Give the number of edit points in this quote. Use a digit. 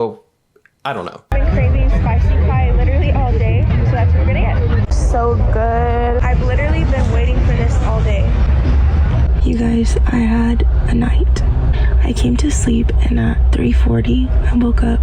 1